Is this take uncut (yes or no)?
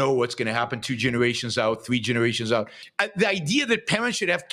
no